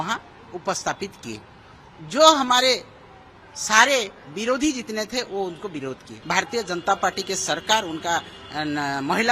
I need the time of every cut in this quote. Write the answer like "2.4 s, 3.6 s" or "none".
6.1 s